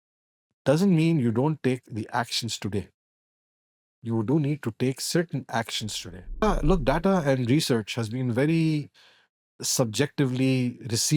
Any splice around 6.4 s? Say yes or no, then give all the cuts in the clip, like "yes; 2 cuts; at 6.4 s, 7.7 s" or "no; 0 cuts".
yes; 1 cut; at 6.4 s